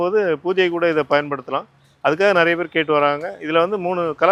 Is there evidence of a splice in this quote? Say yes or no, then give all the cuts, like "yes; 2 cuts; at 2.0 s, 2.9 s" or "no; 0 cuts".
no; 0 cuts